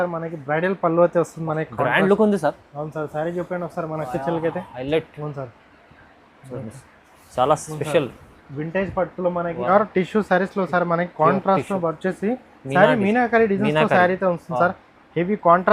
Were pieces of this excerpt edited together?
yes; 1 cut; at 9.7 s

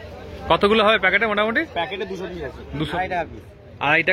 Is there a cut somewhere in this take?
yes; 1 cut; at 2.9 s

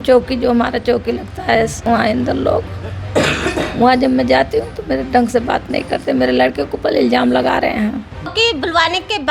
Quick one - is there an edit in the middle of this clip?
yes; 2 cuts; at 1.8 s, 8.3 s

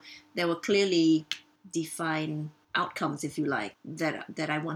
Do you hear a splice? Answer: yes; 2 cuts; at 2.6 s, 3.7 s

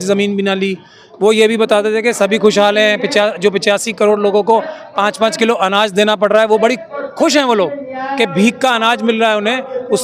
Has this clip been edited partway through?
no; 0 cuts

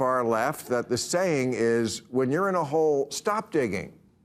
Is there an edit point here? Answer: no; 0 cuts

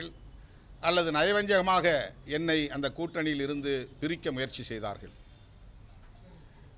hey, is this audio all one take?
yes; 0 cuts

